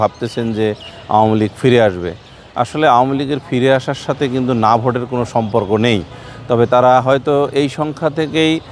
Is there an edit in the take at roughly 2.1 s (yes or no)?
no